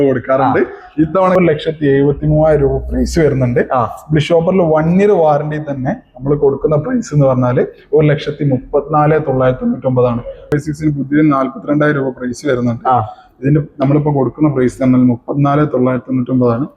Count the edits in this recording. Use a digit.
2